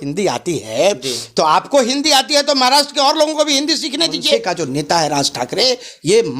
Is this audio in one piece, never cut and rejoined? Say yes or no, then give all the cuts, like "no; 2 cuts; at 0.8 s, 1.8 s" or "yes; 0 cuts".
no; 1 cut; at 4.4 s